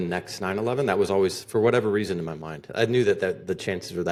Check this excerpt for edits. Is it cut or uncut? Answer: uncut